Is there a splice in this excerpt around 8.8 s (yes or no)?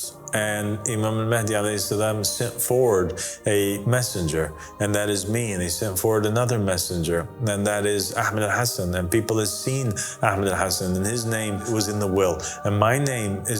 no